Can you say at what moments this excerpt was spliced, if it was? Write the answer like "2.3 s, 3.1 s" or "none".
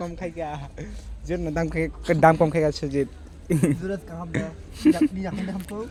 none